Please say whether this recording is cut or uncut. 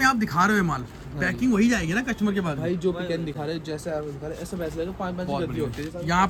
uncut